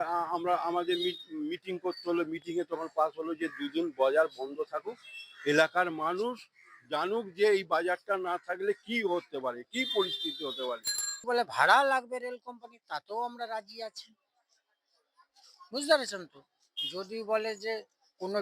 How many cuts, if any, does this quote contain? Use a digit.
1